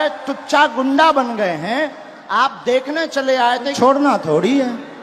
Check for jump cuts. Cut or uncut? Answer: cut